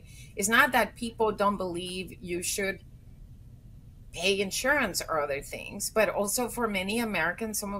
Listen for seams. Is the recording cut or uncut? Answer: cut